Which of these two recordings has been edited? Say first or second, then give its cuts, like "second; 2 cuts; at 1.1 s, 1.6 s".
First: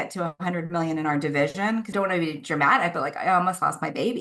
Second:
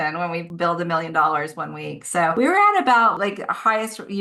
first; 1 cut; at 1.9 s